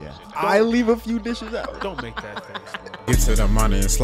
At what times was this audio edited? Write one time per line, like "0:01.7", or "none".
0:03.0